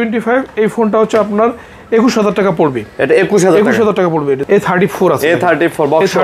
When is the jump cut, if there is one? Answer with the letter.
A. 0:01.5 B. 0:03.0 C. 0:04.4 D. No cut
C